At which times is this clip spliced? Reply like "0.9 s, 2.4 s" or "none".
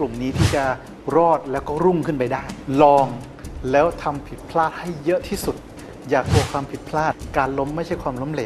2.5 s, 7.1 s